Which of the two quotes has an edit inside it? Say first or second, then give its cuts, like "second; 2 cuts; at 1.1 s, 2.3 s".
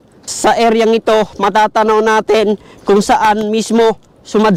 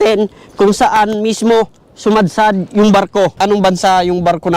second; 1 cut; at 3.3 s